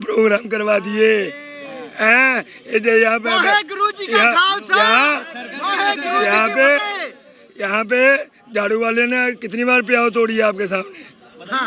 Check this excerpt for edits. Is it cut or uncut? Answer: uncut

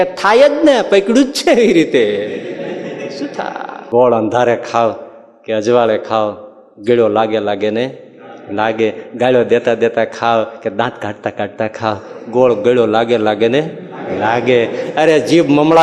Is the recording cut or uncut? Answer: cut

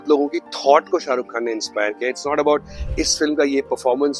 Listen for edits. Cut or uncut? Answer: uncut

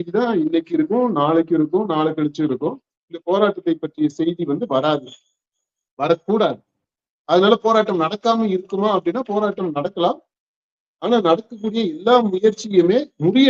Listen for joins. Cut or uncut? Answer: uncut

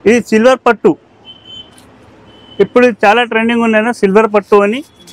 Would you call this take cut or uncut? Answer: uncut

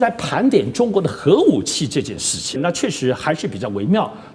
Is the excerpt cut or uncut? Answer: cut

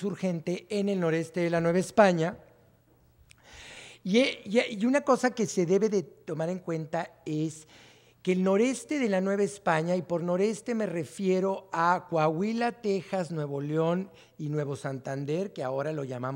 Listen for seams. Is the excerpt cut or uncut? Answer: cut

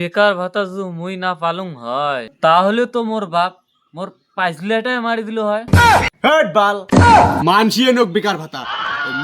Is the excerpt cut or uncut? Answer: cut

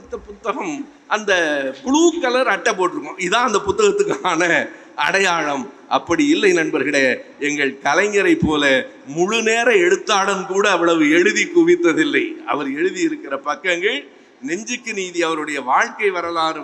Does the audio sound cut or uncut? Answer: uncut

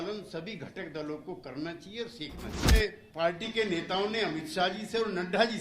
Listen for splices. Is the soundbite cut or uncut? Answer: cut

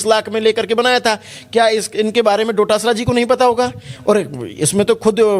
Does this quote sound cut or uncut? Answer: uncut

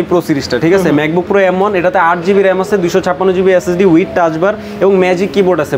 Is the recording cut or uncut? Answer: uncut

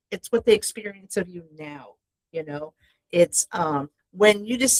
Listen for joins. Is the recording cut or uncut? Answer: uncut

